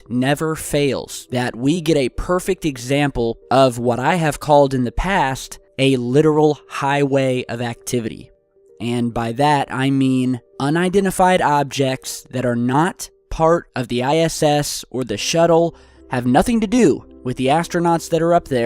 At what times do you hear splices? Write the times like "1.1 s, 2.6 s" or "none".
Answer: 10.7 s